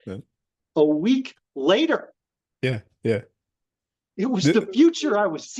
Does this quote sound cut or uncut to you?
uncut